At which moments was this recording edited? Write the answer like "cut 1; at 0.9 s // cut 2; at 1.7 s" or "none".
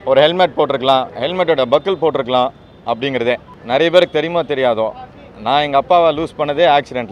cut 1; at 3.5 s